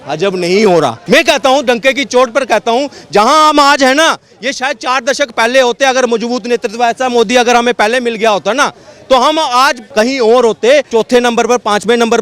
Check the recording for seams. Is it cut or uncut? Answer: cut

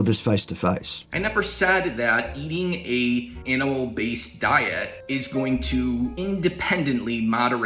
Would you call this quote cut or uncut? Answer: cut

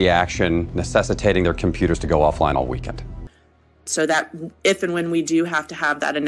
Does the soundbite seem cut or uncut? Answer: cut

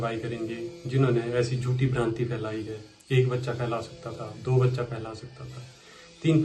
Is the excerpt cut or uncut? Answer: uncut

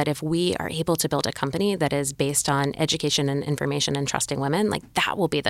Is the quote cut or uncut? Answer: uncut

